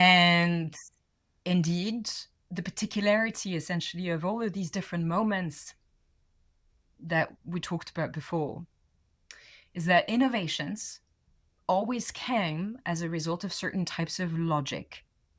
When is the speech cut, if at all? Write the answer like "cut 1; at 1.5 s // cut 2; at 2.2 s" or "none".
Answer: none